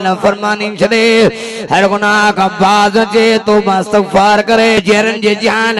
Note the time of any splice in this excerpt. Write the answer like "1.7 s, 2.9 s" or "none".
4.8 s